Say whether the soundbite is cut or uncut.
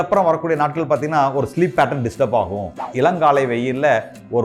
cut